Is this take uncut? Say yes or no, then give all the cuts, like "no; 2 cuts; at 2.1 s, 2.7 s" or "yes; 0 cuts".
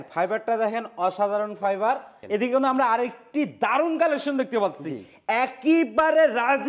no; 1 cut; at 2.2 s